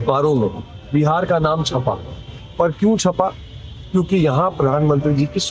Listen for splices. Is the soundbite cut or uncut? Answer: uncut